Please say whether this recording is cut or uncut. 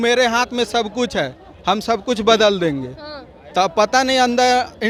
uncut